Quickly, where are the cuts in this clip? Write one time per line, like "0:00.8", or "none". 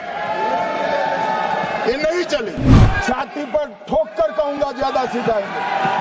0:02.7